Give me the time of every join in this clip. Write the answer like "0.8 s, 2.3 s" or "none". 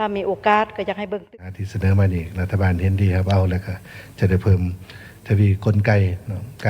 1.2 s